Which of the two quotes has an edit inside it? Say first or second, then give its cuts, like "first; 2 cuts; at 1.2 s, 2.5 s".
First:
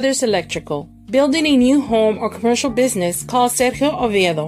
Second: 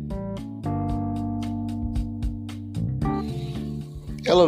second; 1 cut; at 3.3 s